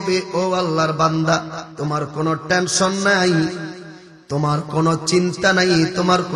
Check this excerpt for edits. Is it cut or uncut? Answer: cut